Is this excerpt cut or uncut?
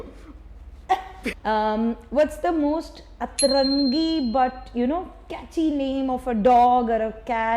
cut